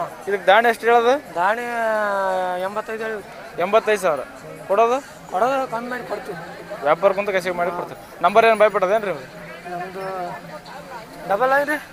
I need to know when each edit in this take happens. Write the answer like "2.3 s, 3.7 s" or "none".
none